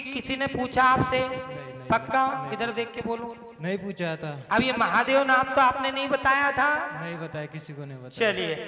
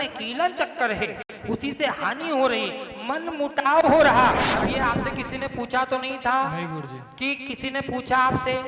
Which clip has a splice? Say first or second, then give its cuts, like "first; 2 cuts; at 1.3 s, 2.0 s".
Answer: second; 1 cut; at 4.5 s